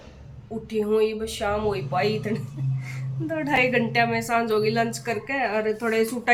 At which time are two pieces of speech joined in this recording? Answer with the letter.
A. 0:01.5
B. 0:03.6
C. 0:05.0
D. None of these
D